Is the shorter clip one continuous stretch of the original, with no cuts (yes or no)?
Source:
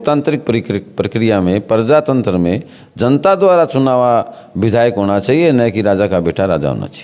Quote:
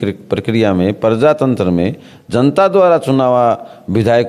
yes